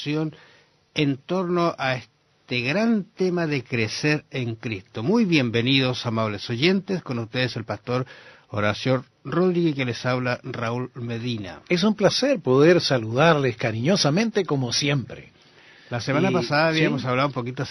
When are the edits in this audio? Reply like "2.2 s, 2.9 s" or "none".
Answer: none